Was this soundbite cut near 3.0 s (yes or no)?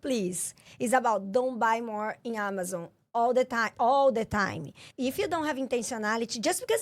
no